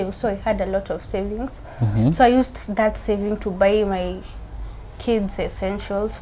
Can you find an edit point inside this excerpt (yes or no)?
no